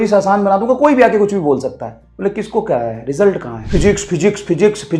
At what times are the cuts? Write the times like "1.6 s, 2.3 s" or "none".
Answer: 3.6 s